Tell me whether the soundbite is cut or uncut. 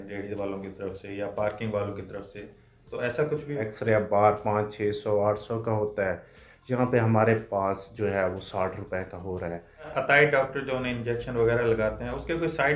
cut